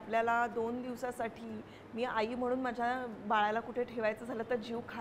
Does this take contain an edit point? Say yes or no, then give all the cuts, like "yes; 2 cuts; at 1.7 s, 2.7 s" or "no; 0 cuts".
no; 0 cuts